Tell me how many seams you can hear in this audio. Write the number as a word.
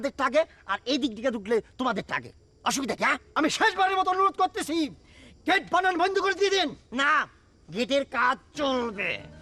one